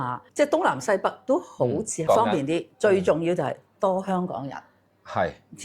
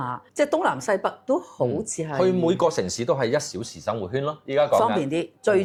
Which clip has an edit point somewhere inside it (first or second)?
first